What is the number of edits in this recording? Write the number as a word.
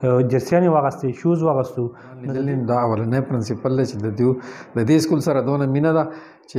one